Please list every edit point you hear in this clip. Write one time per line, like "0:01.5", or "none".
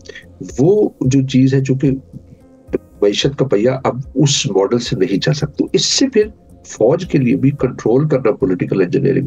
0:05.4